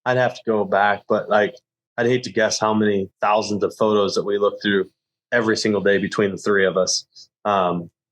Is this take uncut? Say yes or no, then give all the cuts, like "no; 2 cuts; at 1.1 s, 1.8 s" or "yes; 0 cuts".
yes; 0 cuts